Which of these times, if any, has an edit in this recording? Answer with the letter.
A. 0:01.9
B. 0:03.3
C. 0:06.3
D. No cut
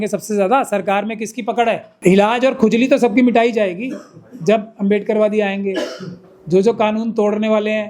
A